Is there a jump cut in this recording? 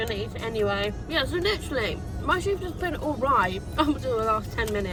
no; 0 cuts

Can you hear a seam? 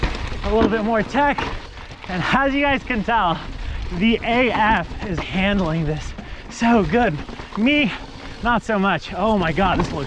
no; 0 cuts

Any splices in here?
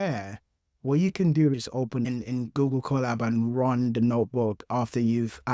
yes; 1 cut; at 2.0 s

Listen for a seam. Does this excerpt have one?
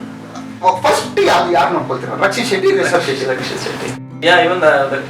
yes; 1 cut; at 4.0 s

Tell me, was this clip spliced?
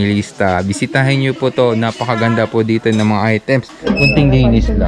yes; 1 cut; at 3.7 s

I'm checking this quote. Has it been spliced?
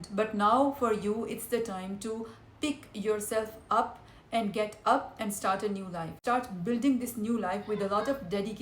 yes; 1 cut; at 6.2 s

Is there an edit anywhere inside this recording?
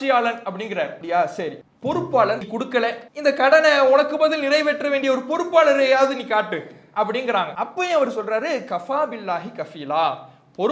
yes; 4 cuts; at 1.0 s, 1.7 s, 2.5 s, 7.5 s

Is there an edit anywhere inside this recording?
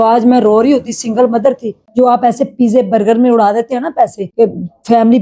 yes; 2 cuts; at 1.8 s, 4.2 s

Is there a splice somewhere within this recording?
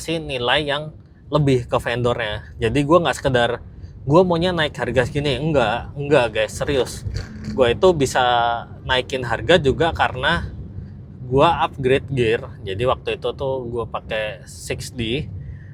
no; 0 cuts

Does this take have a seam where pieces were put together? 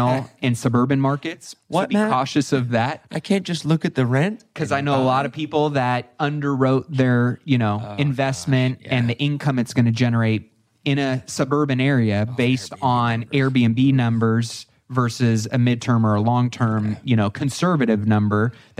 no; 0 cuts

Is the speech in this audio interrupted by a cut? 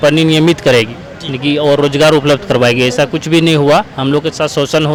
no; 0 cuts

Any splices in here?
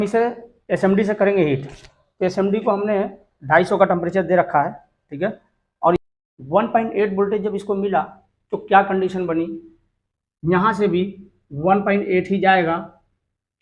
yes; 1 cut; at 6.0 s

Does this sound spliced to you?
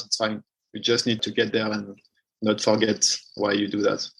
no; 0 cuts

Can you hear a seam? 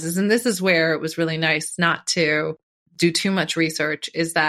yes; 1 cut; at 2.7 s

